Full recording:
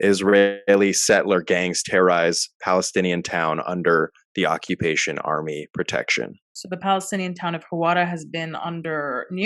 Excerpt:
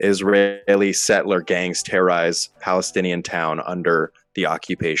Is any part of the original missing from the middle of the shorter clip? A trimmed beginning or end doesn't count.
no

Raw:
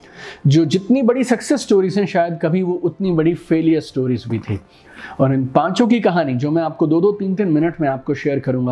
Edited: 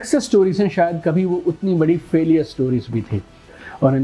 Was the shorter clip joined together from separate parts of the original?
no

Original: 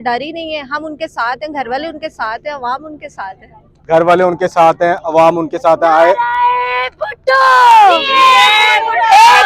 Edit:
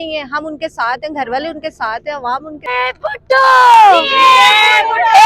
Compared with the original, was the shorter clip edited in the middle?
yes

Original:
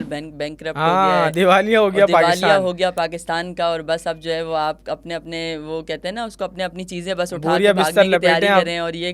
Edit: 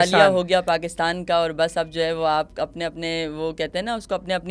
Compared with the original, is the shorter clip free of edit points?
yes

